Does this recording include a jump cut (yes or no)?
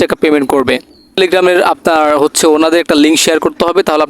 yes